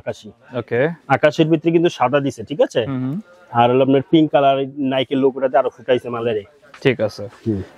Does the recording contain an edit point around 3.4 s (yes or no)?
no